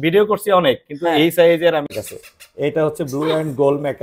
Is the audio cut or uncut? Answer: cut